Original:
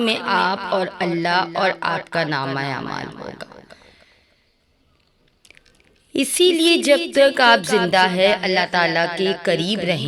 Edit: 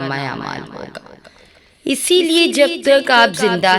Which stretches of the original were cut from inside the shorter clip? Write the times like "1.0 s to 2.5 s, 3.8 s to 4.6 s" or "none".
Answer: 4.5 s to 6.3 s